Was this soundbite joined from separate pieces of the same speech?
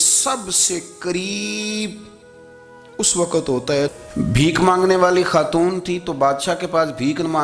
yes; 1 cut; at 3.9 s

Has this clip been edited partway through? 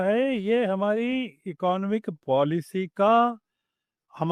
no; 0 cuts

